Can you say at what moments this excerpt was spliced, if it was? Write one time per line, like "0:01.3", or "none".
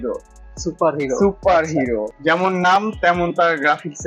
0:02.1